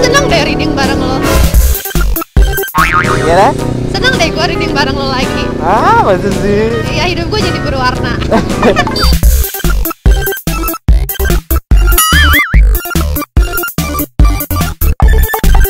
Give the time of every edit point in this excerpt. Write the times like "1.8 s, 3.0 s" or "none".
none